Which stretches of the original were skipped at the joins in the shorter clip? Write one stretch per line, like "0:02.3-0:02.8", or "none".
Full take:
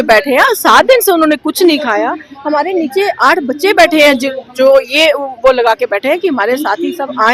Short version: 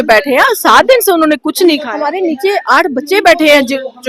0:01.9-0:02.4